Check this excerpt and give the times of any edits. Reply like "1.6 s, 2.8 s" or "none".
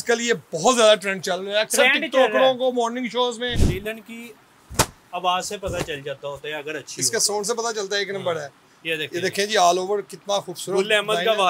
3.6 s